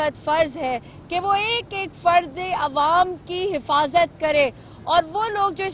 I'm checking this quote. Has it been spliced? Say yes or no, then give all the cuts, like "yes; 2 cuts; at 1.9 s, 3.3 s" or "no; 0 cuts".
no; 0 cuts